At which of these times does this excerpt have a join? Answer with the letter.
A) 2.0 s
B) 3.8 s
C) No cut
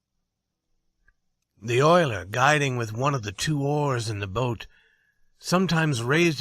B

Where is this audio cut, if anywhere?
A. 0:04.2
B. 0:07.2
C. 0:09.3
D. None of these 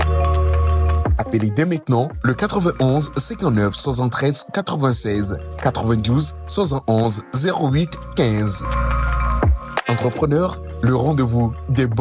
D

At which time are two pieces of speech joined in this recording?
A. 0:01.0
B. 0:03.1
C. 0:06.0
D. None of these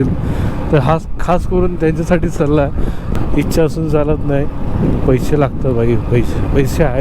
B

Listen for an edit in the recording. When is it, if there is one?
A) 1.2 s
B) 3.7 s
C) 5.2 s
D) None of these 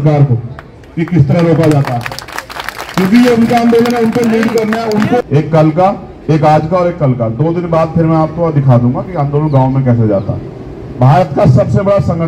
C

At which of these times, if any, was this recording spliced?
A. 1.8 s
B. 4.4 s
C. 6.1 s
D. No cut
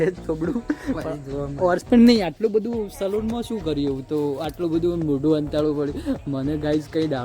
A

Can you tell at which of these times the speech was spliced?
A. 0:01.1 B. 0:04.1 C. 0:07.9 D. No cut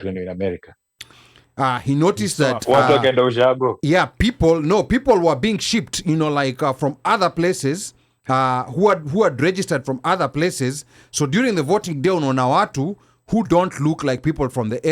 A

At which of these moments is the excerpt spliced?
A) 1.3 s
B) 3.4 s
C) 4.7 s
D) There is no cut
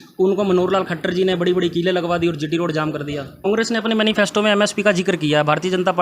B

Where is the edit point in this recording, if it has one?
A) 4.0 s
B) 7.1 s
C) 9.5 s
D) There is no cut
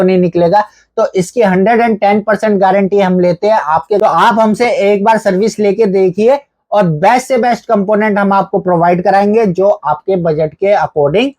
A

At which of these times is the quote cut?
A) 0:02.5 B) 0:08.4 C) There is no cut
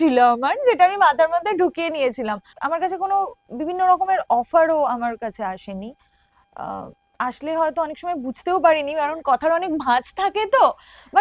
A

